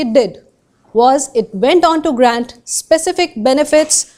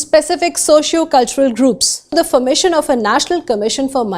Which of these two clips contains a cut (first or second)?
second